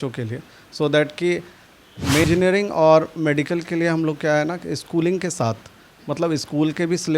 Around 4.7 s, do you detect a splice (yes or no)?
no